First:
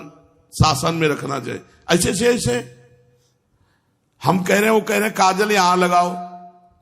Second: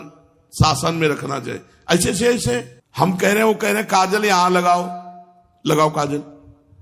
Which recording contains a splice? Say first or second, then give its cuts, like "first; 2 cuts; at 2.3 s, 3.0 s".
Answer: second; 1 cut; at 2.8 s